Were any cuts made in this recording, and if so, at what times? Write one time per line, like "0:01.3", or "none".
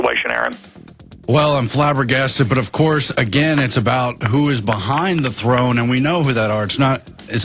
none